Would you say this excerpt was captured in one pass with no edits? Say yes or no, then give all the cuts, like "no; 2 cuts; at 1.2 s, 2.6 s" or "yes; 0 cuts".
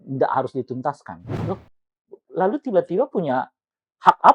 no; 1 cut; at 1.3 s